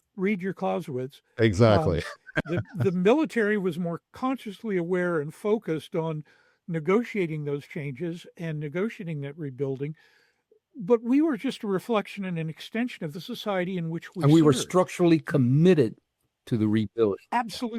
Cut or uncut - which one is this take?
uncut